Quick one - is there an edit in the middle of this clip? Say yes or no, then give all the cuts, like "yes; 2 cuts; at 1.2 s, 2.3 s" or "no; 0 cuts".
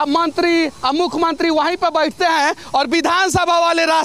no; 0 cuts